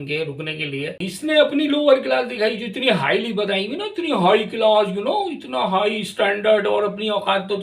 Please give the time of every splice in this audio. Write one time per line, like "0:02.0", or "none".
0:01.0